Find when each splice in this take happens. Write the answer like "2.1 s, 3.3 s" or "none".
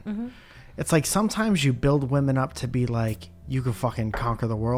none